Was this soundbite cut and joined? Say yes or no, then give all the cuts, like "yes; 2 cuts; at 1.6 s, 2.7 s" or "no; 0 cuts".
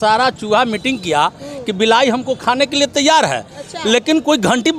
no; 0 cuts